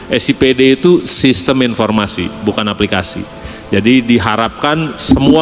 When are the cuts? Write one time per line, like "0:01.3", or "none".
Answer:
none

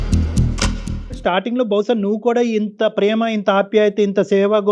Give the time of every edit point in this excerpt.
none

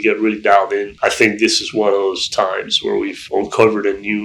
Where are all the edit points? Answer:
0:00.9
0:03.2

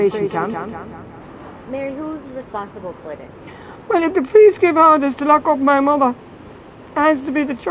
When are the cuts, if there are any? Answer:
0:01.2

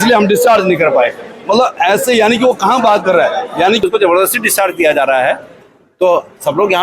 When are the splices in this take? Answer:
0:03.8

